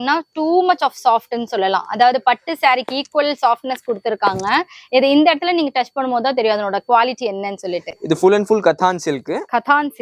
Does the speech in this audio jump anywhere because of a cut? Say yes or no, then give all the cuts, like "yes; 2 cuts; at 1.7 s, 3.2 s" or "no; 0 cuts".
no; 0 cuts